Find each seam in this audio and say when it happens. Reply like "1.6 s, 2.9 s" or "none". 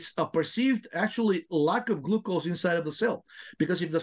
none